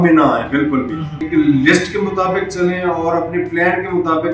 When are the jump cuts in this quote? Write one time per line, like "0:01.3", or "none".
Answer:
0:01.2